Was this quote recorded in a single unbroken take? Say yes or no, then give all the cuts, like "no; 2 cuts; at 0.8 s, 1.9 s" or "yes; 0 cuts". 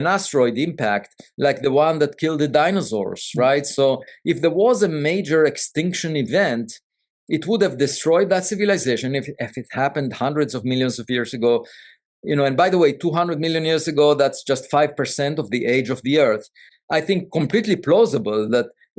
no; 1 cut; at 16.7 s